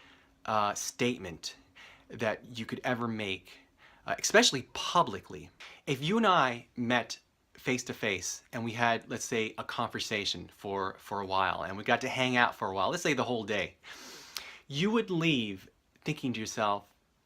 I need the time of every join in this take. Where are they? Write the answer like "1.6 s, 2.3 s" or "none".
7.9 s